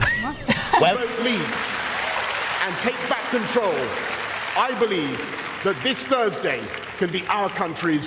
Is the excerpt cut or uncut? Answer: cut